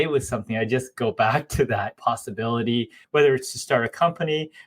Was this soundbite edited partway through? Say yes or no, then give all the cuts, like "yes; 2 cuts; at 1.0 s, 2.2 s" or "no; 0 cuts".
yes; 1 cut; at 2.9 s